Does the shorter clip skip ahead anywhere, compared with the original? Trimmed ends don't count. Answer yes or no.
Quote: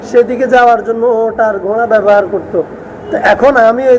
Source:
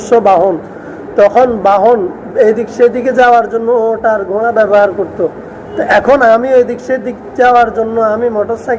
no